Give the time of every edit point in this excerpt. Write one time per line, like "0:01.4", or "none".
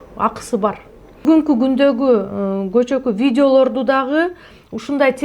0:01.3